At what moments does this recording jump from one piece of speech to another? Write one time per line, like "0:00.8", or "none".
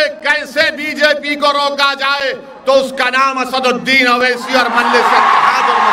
none